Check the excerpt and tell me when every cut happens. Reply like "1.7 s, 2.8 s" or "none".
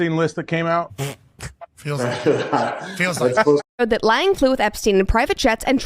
3.7 s